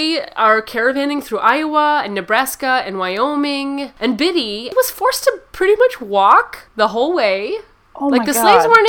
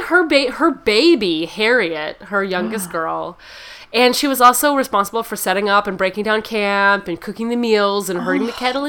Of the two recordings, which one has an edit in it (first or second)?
first